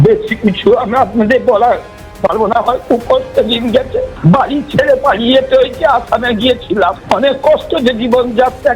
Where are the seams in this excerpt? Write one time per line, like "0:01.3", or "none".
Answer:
0:04.1
0:07.0